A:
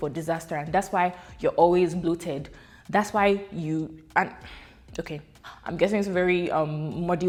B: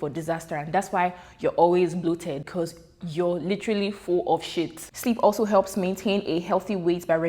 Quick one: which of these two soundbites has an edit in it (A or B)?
B